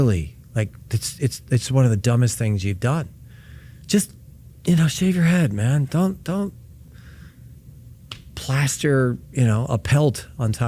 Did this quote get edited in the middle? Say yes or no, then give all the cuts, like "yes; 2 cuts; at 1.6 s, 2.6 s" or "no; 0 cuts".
no; 0 cuts